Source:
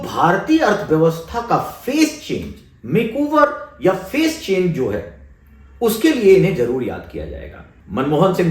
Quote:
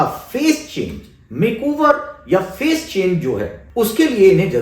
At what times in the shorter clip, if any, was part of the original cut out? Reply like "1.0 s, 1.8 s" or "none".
3.6 s